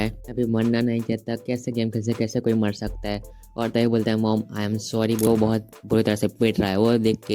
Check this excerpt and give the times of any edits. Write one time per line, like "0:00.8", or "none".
0:05.3